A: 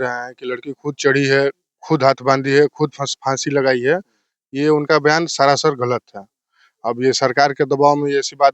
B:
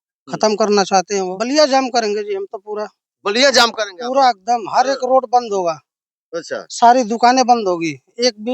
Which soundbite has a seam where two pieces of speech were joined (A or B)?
B